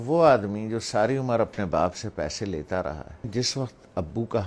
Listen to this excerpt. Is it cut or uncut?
cut